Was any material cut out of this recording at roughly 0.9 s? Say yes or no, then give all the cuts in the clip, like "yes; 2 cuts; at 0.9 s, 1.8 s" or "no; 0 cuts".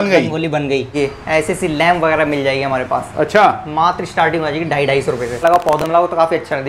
yes; 2 cuts; at 0.9 s, 5.4 s